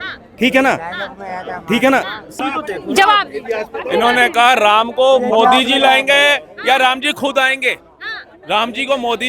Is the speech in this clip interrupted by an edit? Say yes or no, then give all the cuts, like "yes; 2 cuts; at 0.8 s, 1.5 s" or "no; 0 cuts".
yes; 1 cut; at 2.4 s